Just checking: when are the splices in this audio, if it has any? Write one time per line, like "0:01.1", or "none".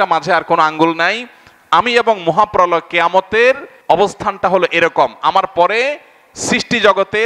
0:03.7